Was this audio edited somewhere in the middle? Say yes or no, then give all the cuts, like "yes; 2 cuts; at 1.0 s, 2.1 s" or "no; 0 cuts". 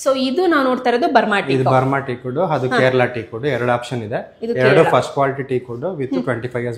no; 0 cuts